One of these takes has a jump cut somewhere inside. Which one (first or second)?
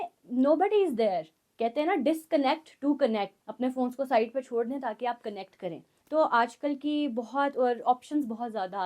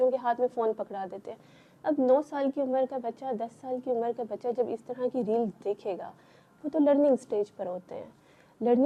first